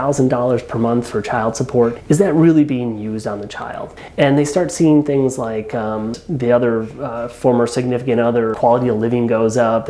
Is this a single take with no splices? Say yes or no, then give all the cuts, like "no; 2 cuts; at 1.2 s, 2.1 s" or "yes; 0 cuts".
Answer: no; 4 cuts; at 2.0 s, 4.0 s, 6.1 s, 8.5 s